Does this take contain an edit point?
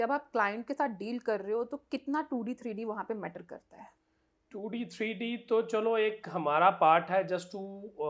no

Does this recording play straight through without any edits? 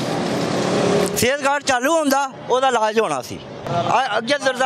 no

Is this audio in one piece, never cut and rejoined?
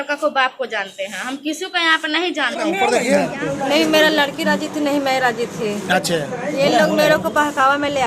no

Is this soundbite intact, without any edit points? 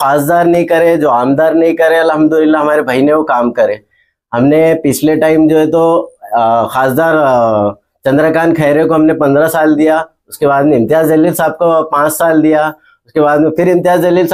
yes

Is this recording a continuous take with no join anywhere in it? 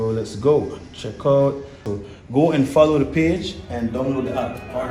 yes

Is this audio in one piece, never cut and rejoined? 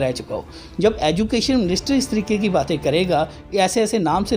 yes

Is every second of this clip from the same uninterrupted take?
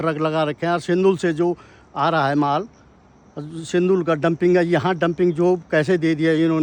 yes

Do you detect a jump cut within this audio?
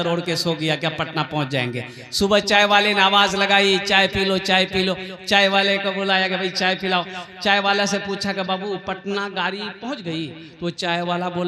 no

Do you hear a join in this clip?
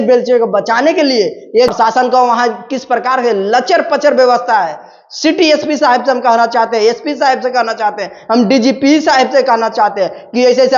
yes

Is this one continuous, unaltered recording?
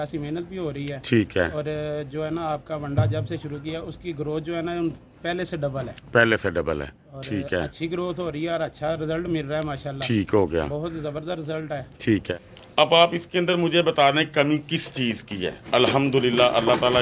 no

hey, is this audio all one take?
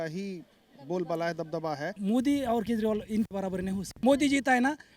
no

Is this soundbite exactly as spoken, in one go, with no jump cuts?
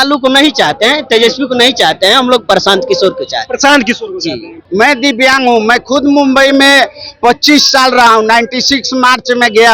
no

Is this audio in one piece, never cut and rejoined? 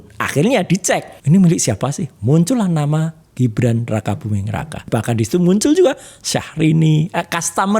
no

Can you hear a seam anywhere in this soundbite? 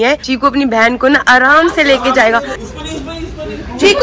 yes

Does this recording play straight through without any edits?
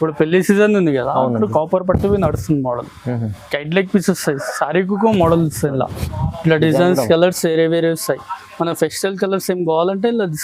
yes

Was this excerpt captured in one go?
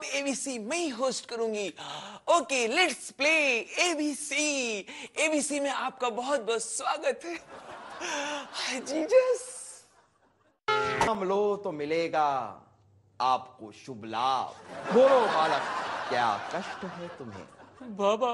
no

